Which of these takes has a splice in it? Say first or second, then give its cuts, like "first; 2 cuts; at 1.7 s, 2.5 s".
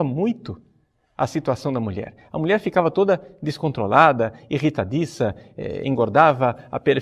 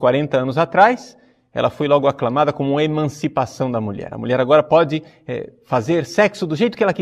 second; 1 cut; at 4.7 s